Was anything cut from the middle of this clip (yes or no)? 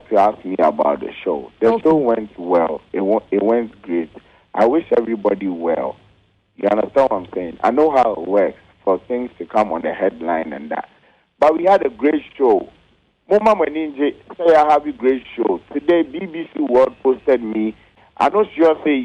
yes